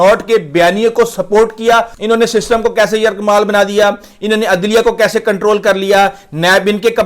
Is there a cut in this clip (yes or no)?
yes